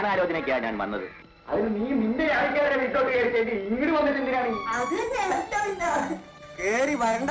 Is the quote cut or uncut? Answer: uncut